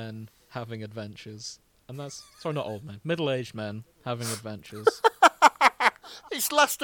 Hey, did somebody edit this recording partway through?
no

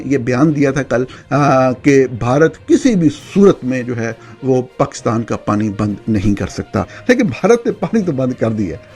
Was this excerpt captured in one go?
no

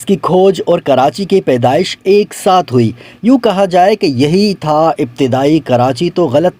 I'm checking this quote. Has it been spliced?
no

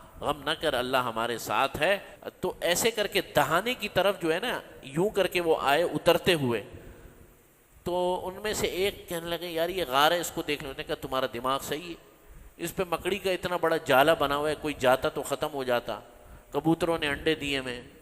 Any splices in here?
yes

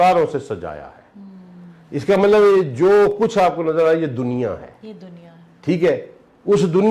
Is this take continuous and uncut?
yes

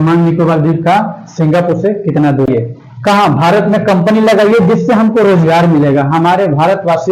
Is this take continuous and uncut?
no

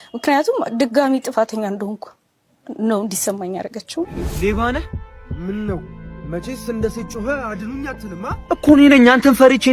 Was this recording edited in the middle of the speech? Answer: yes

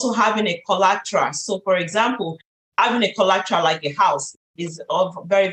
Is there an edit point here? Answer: no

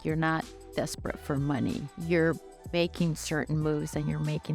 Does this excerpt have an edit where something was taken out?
yes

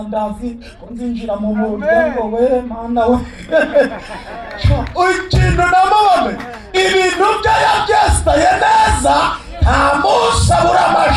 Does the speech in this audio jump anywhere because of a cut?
no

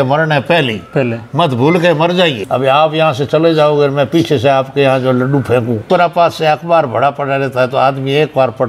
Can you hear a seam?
yes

